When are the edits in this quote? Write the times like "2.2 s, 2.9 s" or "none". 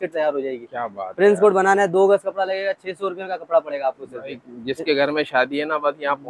none